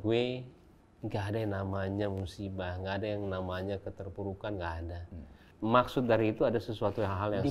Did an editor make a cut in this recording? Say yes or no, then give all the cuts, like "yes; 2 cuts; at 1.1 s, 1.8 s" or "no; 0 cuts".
yes; 1 cut; at 5.5 s